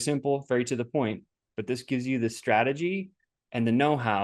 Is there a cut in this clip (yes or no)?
no